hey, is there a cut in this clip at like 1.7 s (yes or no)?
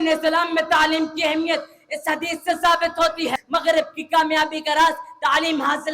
no